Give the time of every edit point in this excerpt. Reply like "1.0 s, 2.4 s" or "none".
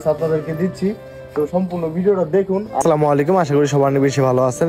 none

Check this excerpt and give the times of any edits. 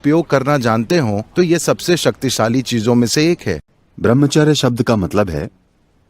3.6 s

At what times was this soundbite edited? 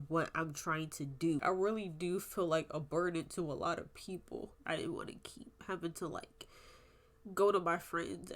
1.4 s, 4.6 s

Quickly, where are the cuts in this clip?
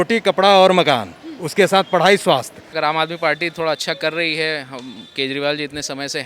2.6 s

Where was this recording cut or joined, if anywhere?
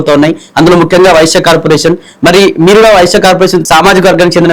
3.6 s

